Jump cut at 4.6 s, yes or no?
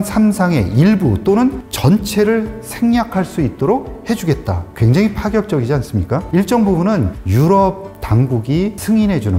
yes